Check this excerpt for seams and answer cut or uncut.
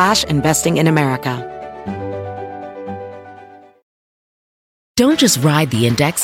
cut